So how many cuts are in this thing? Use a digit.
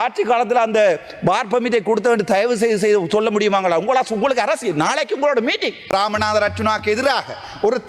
1